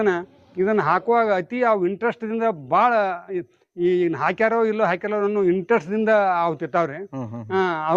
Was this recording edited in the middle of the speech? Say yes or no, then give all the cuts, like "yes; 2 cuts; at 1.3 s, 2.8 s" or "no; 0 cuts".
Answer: no; 0 cuts